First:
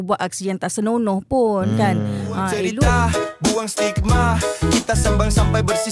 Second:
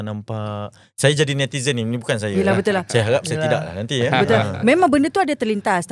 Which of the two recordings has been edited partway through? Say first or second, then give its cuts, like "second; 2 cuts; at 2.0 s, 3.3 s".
first; 1 cut; at 2.6 s